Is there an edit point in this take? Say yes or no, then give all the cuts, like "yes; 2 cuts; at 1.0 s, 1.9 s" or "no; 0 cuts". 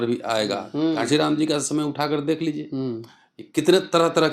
yes; 1 cut; at 0.9 s